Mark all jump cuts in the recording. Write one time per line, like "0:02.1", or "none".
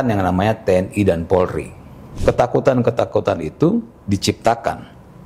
0:02.1